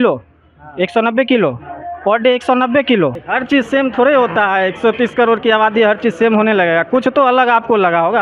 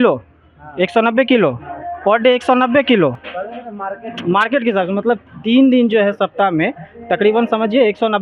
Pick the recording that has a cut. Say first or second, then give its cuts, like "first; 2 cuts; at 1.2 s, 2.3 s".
first; 1 cut; at 3.2 s